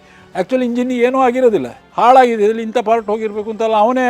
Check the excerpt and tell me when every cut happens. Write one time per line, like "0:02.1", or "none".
0:01.8